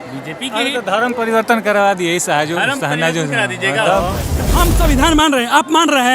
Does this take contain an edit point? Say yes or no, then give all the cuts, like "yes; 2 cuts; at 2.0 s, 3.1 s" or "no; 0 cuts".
yes; 1 cut; at 4.4 s